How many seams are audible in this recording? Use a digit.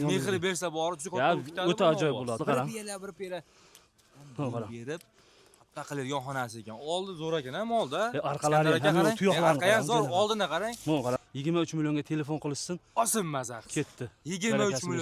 2